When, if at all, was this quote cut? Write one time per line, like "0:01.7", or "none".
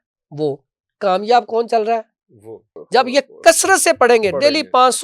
0:02.7